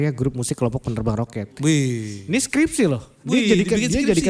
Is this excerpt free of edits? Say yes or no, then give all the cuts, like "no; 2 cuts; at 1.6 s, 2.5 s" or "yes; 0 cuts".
yes; 0 cuts